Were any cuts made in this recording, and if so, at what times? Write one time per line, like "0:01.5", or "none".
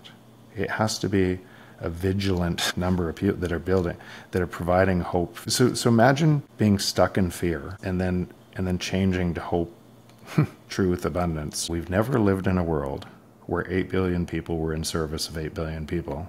0:02.6
0:05.5
0:06.5
0:07.7
0:11.6